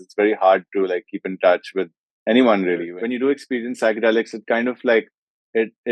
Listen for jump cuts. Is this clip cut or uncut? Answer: cut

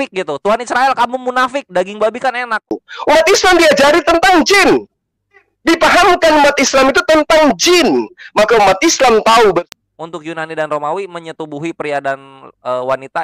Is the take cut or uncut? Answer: cut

